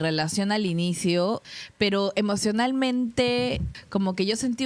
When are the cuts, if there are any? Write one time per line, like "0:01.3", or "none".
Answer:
0:01.5
0:03.7